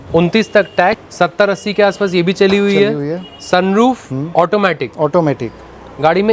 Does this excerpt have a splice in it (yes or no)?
no